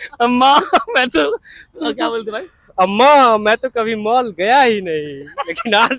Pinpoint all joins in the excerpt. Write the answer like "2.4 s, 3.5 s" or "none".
none